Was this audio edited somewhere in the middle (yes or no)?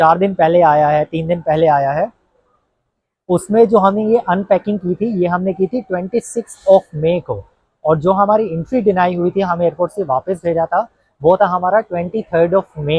no